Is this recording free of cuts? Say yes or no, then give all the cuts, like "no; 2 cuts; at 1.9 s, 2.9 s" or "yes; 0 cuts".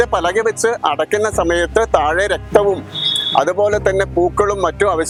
yes; 0 cuts